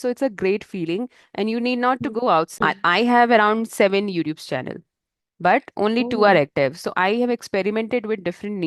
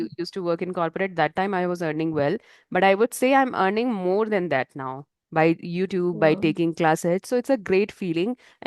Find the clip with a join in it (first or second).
first